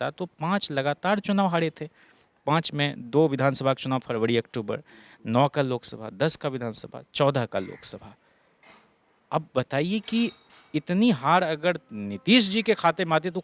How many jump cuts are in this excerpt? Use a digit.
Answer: 0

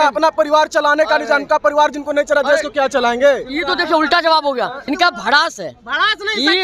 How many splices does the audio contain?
1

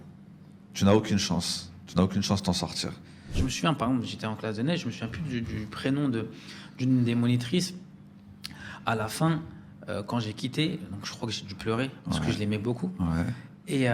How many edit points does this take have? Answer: 1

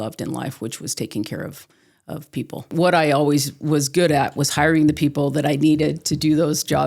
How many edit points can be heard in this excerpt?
1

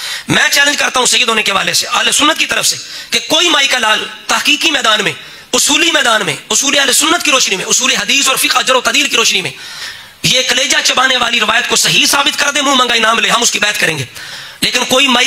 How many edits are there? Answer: 0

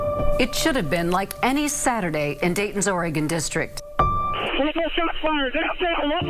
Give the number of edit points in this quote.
1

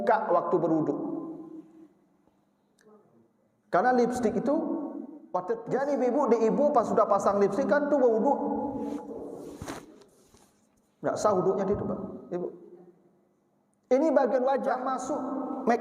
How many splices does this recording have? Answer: 2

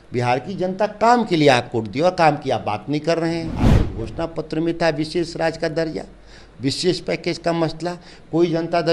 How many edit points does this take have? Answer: 1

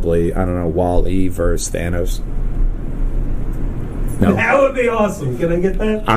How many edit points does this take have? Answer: 0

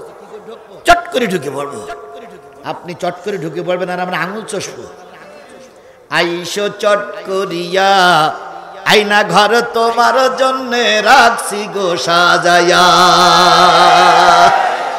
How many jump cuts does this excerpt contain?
0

